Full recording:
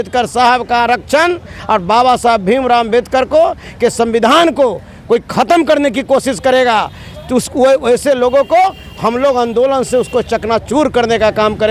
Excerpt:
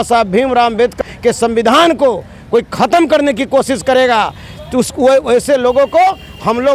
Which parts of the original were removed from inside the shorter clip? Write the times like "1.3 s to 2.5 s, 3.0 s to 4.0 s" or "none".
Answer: 3.1 s to 3.5 s